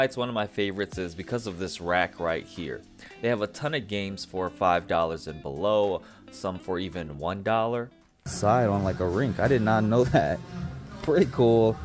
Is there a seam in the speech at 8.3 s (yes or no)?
yes